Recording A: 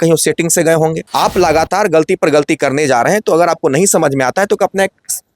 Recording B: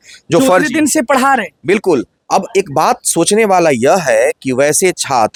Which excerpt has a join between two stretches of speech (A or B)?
A